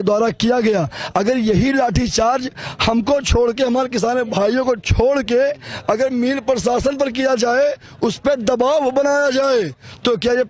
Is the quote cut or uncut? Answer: uncut